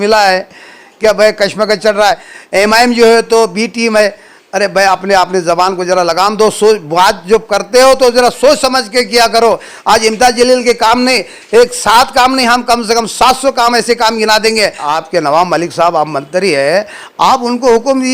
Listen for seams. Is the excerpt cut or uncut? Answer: cut